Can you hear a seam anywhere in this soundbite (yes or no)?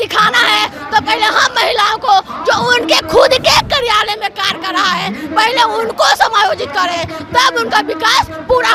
no